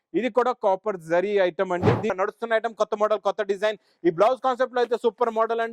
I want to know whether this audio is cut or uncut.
cut